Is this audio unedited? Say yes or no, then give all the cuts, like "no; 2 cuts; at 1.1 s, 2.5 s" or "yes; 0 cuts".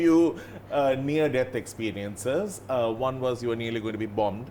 yes; 0 cuts